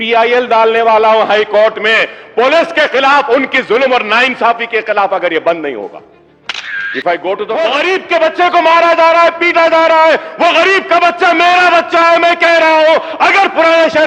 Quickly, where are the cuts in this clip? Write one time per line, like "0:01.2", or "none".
0:07.6